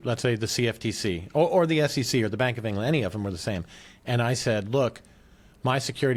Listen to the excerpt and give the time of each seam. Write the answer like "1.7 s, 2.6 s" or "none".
none